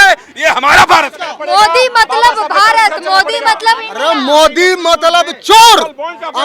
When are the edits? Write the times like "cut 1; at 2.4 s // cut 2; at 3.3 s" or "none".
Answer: cut 1; at 1.3 s